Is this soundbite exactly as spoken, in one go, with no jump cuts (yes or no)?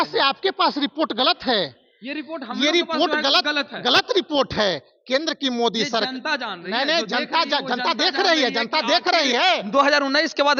yes